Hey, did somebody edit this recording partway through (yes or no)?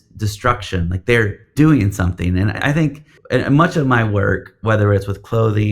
yes